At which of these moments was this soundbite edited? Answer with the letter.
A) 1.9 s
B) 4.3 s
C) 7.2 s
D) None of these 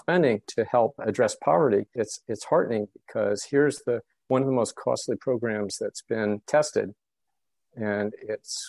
D